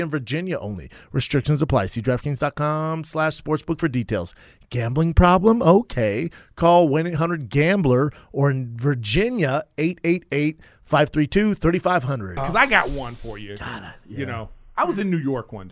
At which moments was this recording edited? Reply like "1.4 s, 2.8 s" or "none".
12.4 s